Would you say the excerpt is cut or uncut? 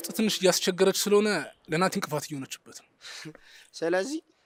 uncut